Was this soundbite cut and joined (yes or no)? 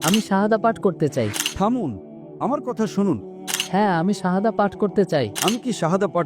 yes